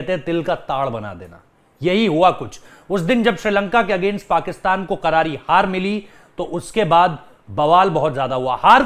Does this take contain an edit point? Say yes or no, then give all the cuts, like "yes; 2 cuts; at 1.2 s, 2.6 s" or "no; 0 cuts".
no; 0 cuts